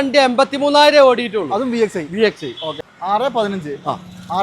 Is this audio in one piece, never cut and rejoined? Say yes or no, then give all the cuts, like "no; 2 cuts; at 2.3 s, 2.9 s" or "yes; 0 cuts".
no; 1 cut; at 2.8 s